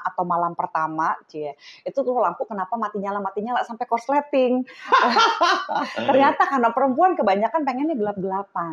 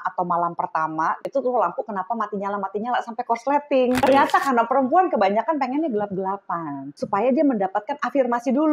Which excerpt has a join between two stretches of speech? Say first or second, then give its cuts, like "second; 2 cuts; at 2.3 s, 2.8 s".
second; 3 cuts; at 1.2 s, 4.0 s, 6.9 s